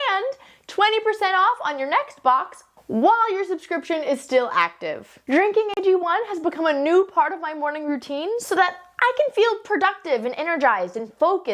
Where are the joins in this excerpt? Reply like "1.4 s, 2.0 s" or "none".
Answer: 5.1 s